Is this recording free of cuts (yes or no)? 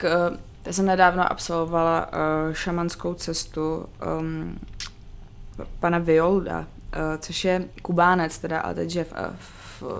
yes